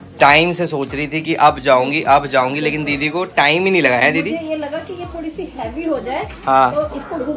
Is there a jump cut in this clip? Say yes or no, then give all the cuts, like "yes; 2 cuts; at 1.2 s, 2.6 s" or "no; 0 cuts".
no; 0 cuts